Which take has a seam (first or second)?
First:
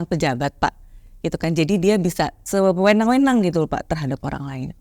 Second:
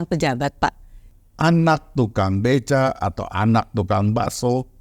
second